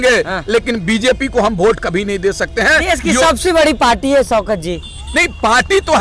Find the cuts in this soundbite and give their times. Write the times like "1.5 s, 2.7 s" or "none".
none